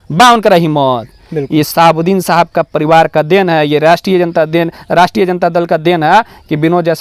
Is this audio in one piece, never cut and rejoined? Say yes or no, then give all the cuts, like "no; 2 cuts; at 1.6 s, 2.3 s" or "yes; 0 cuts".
yes; 0 cuts